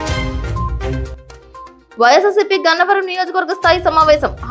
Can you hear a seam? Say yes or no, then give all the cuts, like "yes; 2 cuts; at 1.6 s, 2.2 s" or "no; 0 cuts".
no; 0 cuts